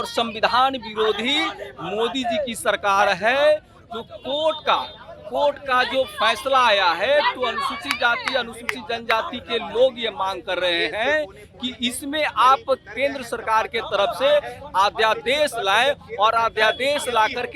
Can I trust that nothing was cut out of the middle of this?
yes; 0 cuts

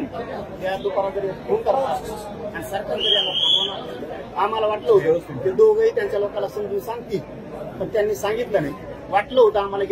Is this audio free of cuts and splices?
yes; 0 cuts

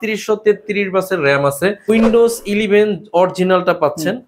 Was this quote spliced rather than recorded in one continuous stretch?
yes; 1 cut; at 1.9 s

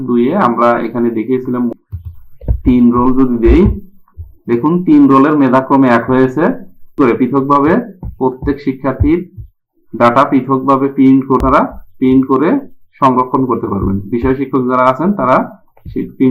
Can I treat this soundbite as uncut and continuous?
no; 3 cuts; at 1.7 s, 7.0 s, 11.4 s

